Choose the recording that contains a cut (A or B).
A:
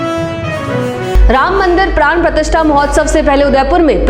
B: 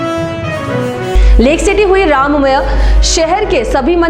A